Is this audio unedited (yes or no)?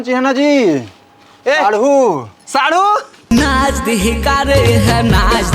no